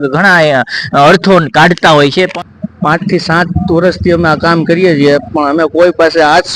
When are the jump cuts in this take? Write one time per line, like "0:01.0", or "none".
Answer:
0:02.3

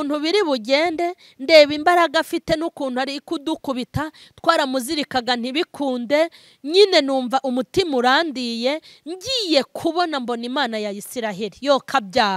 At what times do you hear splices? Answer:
none

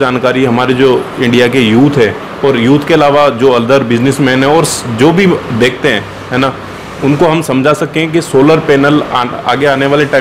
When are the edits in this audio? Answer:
none

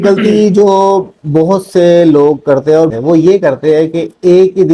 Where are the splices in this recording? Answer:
0:02.9

